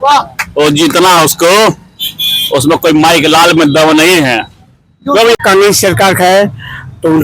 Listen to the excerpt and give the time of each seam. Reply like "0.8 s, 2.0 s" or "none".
5.4 s